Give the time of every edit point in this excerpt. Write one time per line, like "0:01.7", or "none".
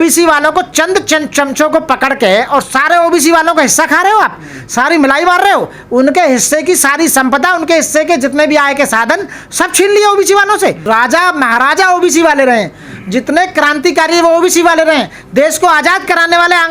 0:10.8